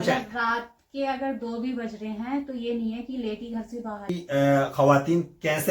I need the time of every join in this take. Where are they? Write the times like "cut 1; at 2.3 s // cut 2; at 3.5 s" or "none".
cut 1; at 4.2 s